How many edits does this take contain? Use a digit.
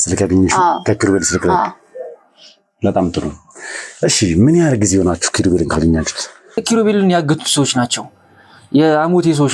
1